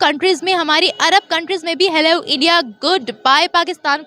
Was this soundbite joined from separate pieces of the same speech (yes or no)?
no